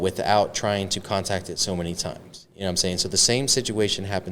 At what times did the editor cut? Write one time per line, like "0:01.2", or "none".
none